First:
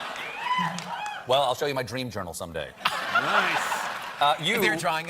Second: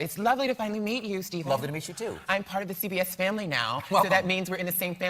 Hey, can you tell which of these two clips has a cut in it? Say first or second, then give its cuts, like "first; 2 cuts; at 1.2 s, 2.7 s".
first; 1 cut; at 3.5 s